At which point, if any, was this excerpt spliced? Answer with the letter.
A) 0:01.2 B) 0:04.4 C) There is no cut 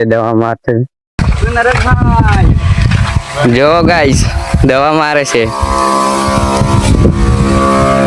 C